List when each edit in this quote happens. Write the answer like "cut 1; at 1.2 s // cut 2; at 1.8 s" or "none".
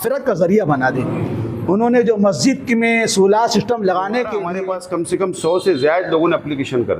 cut 1; at 4.5 s